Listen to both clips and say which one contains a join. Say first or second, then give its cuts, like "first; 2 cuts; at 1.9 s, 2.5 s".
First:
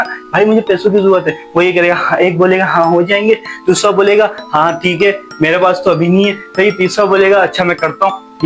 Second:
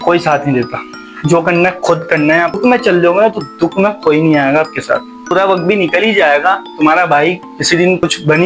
second; 2 cuts; at 2.6 s, 5.3 s